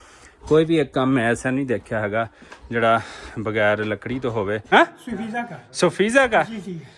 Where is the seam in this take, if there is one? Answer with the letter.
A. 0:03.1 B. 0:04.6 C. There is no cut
B